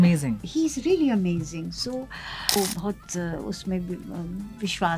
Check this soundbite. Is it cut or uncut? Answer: cut